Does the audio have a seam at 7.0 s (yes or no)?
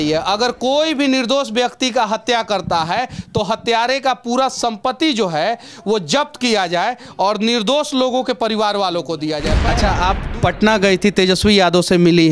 no